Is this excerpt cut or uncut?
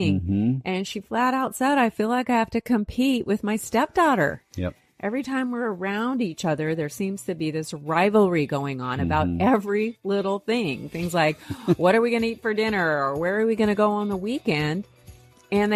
uncut